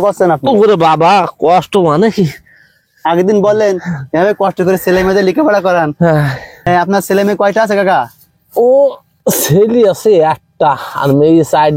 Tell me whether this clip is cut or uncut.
cut